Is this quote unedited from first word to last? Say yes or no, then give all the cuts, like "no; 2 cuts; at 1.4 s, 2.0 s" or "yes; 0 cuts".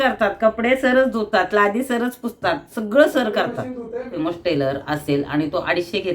no; 1 cut; at 4.2 s